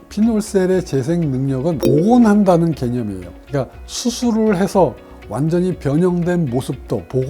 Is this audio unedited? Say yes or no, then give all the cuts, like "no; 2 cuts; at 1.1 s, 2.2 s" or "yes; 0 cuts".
no; 1 cut; at 1.9 s